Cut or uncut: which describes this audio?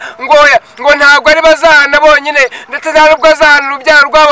uncut